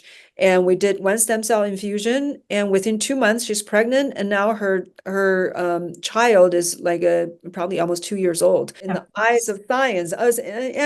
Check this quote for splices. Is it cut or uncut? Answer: cut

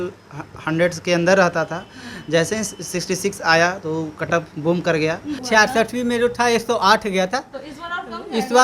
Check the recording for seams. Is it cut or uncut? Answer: cut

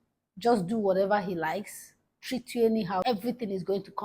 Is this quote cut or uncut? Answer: cut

